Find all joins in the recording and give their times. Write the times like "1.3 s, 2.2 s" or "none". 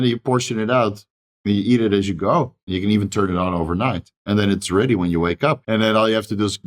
2.6 s, 4.1 s, 5.6 s